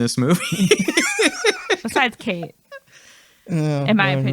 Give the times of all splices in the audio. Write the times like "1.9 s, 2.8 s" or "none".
none